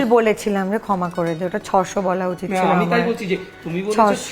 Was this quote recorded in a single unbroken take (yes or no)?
yes